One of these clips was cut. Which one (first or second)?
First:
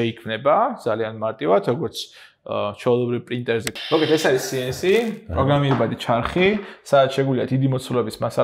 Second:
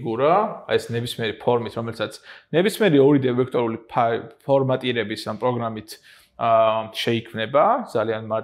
first